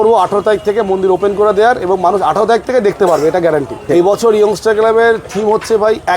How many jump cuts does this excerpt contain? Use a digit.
1